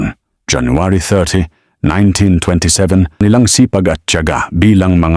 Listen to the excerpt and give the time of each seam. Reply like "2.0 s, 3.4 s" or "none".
3.2 s